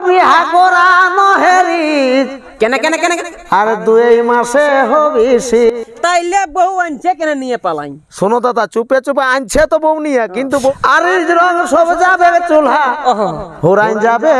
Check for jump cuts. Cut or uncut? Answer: cut